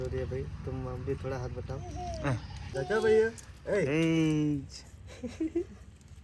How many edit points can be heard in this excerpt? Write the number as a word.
one